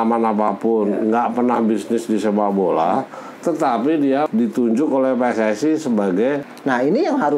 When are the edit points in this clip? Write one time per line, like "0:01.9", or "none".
0:04.3
0:06.5

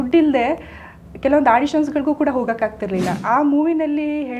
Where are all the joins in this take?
0:03.1

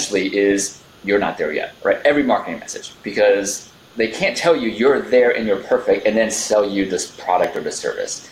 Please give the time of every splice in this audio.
0:01.7

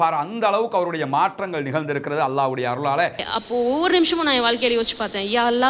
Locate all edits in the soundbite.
0:03.2

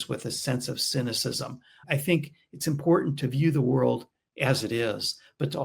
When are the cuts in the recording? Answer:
0:01.8

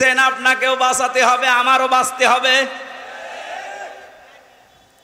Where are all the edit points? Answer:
none

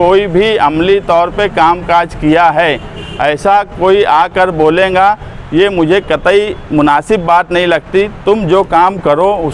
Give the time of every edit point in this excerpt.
none

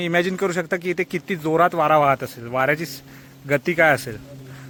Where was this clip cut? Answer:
none

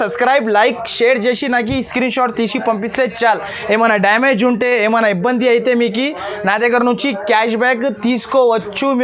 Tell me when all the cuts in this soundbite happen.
none

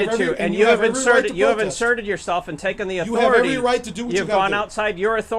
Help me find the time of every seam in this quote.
none

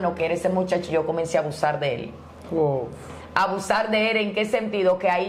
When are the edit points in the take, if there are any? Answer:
none

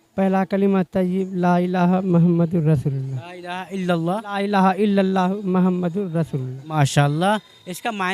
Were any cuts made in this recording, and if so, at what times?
none

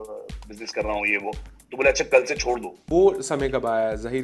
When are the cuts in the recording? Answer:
0:02.8

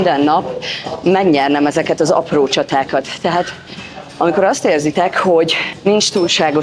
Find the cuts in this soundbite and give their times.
0:05.7

